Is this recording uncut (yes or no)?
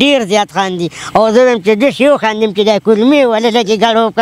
yes